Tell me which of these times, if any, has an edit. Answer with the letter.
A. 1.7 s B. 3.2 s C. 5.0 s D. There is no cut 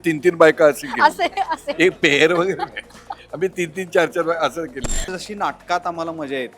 C